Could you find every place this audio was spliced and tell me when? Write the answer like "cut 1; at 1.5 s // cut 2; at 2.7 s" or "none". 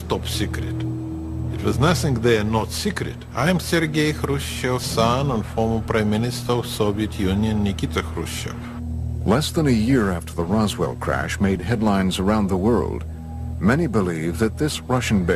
cut 1; at 7.4 s